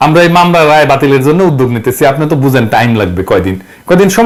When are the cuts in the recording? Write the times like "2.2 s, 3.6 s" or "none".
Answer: none